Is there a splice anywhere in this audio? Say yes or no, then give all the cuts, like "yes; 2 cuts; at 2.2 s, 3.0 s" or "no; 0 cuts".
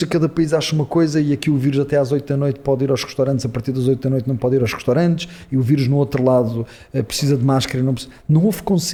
no; 0 cuts